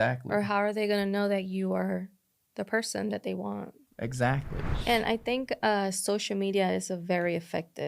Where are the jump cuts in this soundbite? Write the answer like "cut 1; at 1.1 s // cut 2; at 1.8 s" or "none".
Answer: cut 1; at 4.6 s